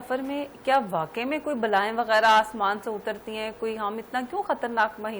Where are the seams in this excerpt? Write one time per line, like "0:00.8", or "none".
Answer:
none